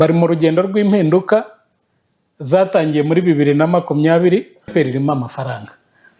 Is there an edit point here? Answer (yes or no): yes